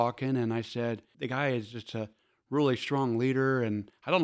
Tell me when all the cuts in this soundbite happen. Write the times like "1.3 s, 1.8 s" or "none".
1.1 s, 2.2 s